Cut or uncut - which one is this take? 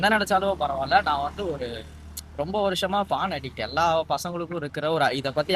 uncut